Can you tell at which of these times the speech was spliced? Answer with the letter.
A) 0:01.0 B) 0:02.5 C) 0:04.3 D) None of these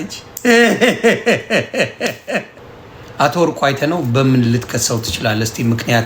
B